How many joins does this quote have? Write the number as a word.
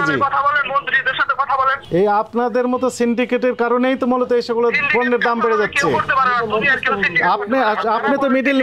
one